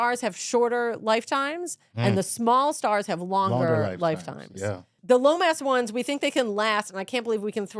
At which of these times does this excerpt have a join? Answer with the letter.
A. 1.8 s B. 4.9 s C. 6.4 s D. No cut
B